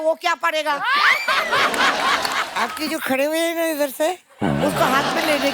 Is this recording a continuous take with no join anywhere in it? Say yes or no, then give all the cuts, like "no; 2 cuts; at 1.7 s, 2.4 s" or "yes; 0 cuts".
no; 1 cut; at 2.5 s